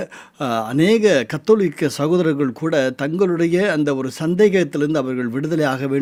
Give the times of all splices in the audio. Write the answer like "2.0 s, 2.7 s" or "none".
none

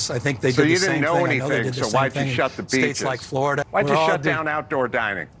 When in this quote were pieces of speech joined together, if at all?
3.6 s

